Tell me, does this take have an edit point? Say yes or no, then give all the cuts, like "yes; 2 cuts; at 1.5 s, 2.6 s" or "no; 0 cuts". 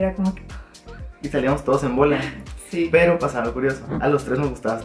no; 0 cuts